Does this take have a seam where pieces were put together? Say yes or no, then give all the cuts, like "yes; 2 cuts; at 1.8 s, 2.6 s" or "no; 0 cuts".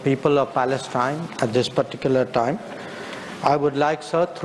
no; 0 cuts